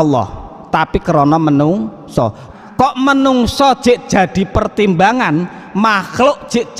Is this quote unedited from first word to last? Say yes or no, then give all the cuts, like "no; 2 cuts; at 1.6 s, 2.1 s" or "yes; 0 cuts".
no; 1 cut; at 2.5 s